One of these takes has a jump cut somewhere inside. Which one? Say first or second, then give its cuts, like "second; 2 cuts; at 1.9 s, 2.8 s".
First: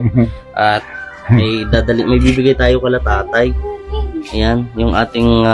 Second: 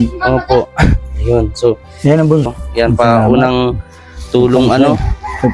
second; 1 cut; at 2.5 s